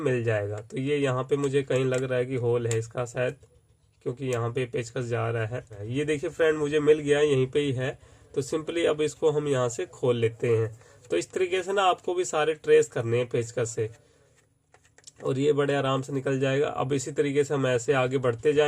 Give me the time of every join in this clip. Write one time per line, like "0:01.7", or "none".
none